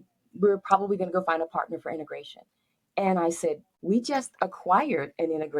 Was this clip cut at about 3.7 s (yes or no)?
yes